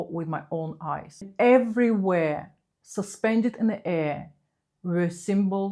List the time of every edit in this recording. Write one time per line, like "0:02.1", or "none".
0:01.3